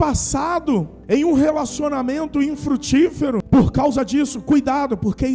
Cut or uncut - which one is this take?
cut